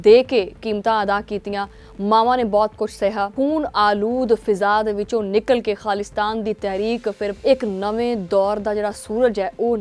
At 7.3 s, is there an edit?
yes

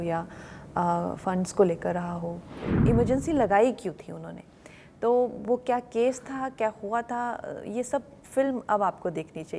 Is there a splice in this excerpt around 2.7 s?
yes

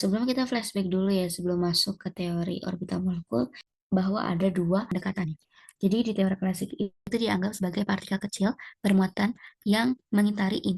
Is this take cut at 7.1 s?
yes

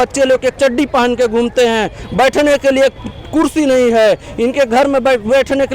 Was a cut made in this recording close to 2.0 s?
no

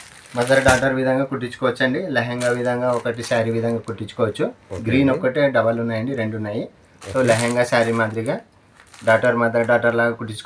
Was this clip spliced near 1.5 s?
no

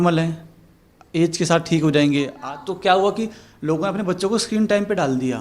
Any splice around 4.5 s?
no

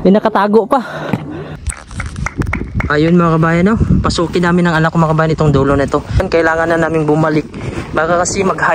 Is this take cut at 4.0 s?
no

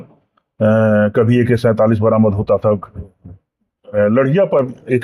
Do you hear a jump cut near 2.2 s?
no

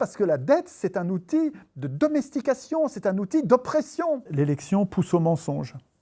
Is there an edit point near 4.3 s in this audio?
yes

